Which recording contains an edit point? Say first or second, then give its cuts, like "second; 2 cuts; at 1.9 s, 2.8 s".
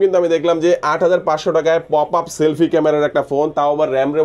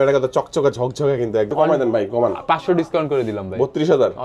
second; 1 cut; at 1.5 s